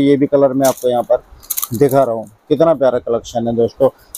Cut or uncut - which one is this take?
uncut